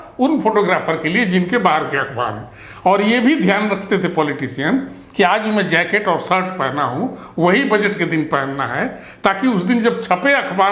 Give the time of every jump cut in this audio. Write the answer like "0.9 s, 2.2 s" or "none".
none